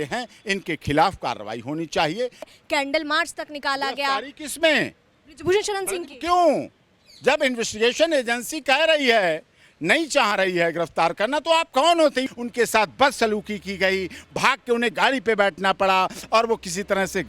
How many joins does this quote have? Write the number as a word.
two